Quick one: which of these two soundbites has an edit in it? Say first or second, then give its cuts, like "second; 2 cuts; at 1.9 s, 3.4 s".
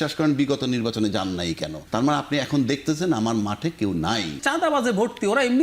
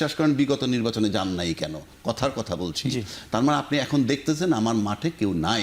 first; 2 cuts; at 1.8 s, 4.4 s